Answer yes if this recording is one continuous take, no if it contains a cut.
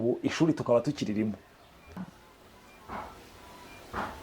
no